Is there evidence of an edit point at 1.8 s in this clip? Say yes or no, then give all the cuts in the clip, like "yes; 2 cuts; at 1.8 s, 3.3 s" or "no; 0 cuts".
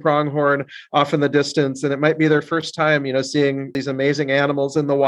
no; 1 cut; at 3.8 s